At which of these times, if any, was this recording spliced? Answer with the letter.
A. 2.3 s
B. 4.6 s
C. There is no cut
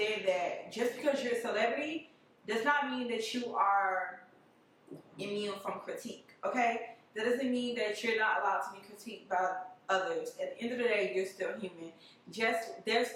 C